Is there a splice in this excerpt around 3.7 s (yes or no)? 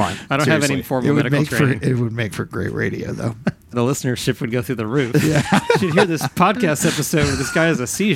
yes